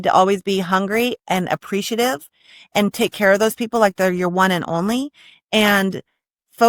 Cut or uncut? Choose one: uncut